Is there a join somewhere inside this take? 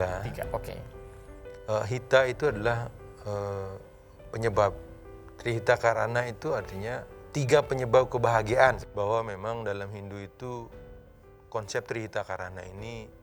yes; 1 cut; at 8.9 s

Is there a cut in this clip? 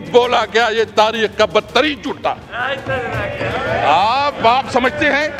no; 0 cuts

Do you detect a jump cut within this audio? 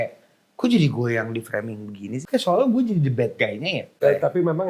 yes; 2 cuts; at 2.2 s, 3.9 s

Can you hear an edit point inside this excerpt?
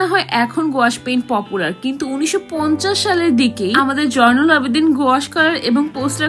no; 0 cuts

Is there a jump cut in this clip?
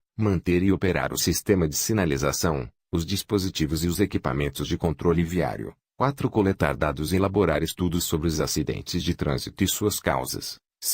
yes; 1 cut; at 6.6 s

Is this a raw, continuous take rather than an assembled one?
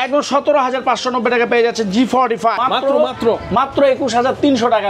no; 1 cut; at 2.6 s

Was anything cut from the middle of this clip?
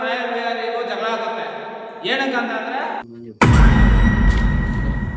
yes; 1 cut; at 3.1 s

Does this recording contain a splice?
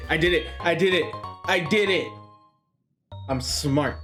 no; 0 cuts

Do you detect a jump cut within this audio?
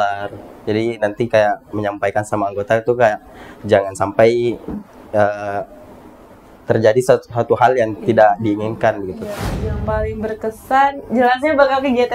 yes; 1 cut; at 9.5 s

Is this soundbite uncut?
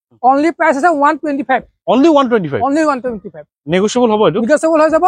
yes; 0 cuts

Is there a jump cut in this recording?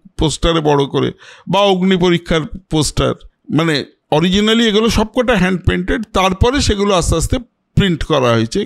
yes; 1 cut; at 3.3 s

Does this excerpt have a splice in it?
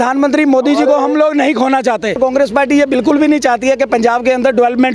yes; 1 cut; at 2.2 s

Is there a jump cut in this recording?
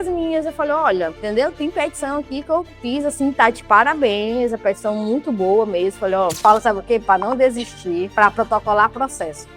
yes; 1 cut; at 6.4 s

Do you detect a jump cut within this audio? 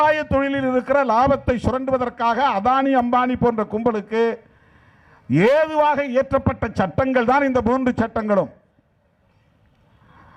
no; 0 cuts

